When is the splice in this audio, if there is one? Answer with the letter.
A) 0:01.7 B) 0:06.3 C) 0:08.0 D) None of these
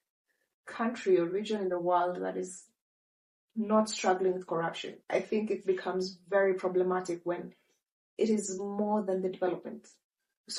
D